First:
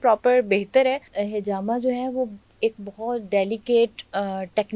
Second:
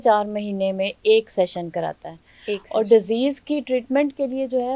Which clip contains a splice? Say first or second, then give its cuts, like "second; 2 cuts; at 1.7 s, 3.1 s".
first; 1 cut; at 1.1 s